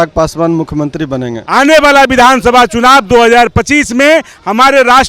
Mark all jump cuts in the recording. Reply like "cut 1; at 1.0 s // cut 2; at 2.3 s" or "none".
cut 1; at 1.3 s